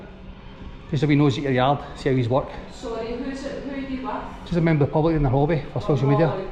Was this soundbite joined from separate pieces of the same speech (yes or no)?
no